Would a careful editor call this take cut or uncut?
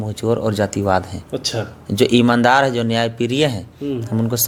uncut